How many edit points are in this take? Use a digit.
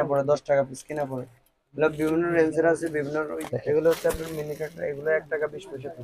1